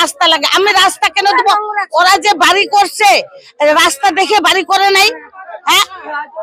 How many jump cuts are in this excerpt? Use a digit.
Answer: 0